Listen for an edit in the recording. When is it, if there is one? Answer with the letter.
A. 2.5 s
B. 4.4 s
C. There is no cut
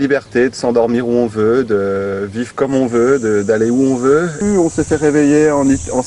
B